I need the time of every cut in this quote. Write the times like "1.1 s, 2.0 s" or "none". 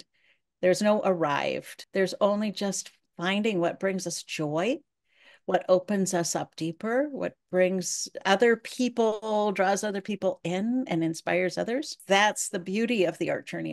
1.7 s, 11.9 s